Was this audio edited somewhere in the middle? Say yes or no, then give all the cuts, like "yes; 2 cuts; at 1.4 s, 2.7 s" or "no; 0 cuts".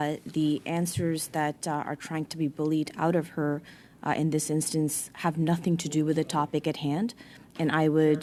no; 0 cuts